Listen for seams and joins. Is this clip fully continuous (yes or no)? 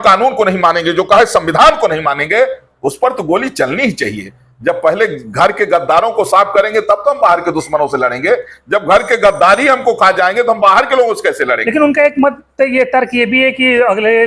yes